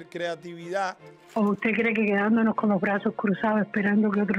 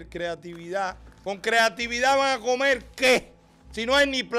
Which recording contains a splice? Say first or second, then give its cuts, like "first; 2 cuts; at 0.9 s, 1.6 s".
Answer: first; 1 cut; at 1.2 s